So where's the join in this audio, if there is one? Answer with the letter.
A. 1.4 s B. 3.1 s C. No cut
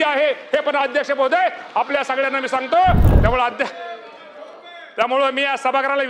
B